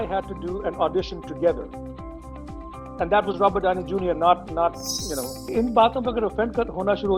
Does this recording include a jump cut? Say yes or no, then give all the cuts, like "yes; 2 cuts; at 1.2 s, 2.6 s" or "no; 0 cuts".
yes; 1 cut; at 5.4 s